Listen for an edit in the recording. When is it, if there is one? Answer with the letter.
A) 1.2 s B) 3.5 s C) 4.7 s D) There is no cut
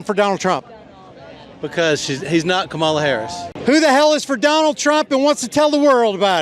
B